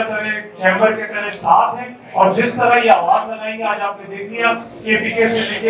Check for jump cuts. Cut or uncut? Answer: uncut